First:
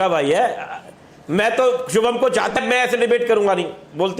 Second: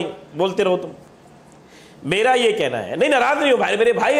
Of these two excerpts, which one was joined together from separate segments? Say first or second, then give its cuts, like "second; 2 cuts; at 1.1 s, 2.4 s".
first; 1 cut; at 2.6 s